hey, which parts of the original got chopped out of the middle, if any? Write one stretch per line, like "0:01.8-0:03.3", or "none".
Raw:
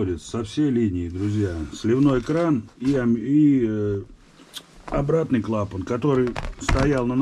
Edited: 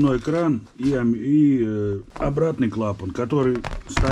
0:04.1-0:04.8